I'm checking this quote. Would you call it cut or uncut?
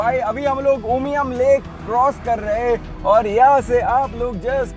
uncut